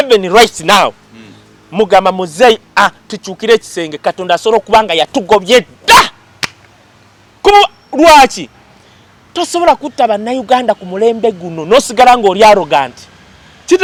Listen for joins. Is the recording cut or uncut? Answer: uncut